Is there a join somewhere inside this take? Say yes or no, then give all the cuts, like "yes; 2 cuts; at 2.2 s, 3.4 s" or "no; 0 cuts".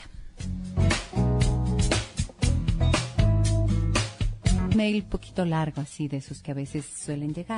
no; 0 cuts